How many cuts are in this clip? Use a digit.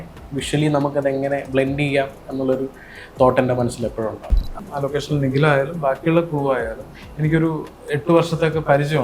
1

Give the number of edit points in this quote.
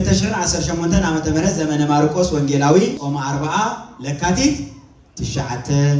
1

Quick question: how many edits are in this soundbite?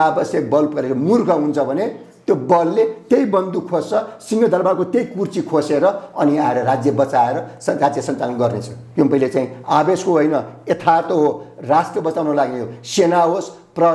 1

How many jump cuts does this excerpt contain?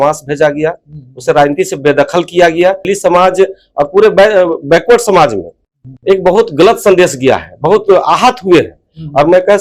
1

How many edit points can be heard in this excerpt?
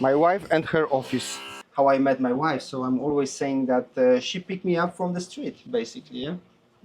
1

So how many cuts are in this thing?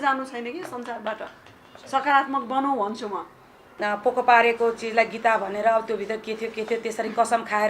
1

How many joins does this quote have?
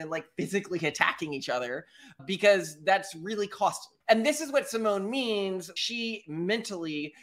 2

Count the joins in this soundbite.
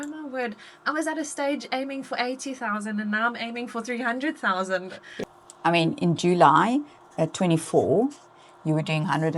1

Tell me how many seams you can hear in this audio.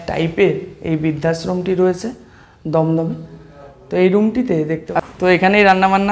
1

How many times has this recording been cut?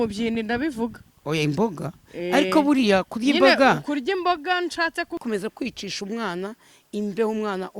1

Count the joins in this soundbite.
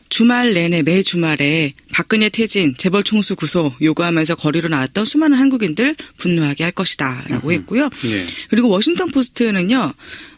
1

